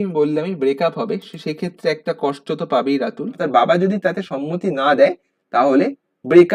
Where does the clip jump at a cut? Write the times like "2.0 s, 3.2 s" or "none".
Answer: 3.4 s